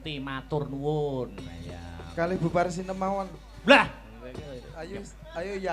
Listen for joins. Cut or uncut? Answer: uncut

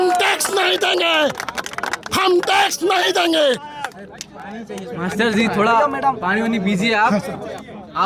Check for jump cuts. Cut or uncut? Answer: uncut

